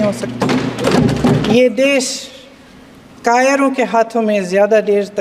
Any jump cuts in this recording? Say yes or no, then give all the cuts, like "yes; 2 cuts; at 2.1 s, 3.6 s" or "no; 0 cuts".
yes; 1 cut; at 1.5 s